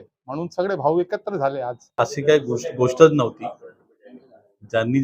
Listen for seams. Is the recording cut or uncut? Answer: cut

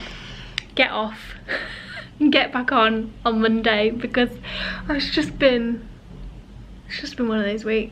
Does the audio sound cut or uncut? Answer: uncut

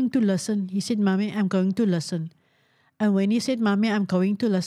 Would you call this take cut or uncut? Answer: uncut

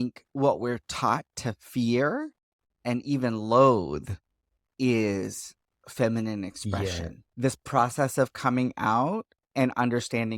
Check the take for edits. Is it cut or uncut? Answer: cut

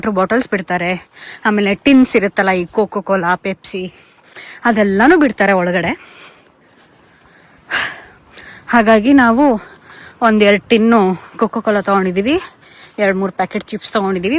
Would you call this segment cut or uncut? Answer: uncut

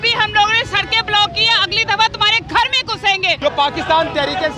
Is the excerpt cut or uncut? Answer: cut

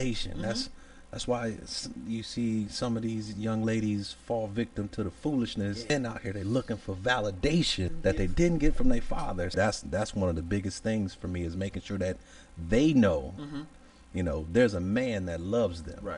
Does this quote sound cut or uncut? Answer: cut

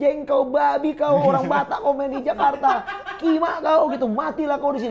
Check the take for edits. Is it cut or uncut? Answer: uncut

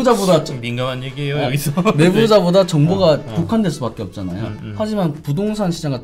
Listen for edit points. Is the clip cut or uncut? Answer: uncut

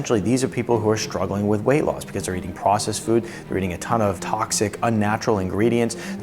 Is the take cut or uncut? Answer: cut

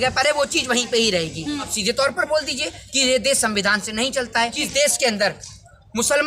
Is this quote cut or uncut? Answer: cut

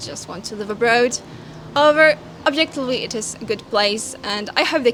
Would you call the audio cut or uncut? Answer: uncut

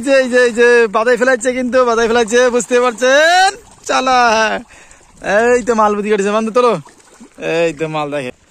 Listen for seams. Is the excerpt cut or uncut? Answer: uncut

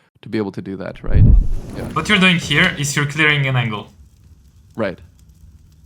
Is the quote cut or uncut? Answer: cut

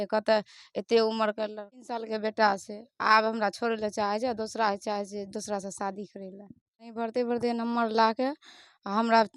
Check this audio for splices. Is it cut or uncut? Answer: cut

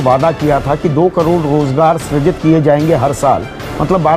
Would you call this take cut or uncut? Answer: uncut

